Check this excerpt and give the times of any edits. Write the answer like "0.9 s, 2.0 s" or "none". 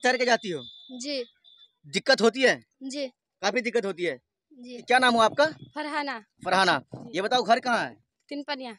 4.8 s